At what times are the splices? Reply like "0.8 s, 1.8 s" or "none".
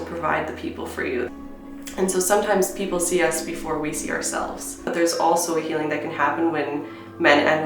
1.3 s, 4.9 s